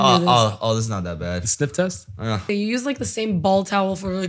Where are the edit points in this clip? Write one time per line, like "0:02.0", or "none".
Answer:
0:02.4